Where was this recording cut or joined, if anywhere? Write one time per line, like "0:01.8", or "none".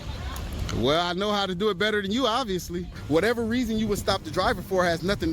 0:02.9